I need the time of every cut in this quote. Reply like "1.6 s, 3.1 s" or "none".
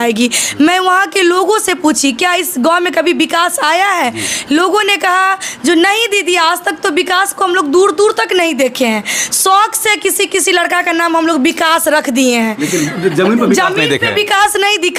none